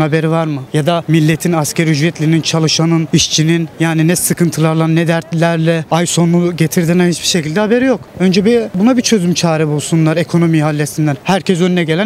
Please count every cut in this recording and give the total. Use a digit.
5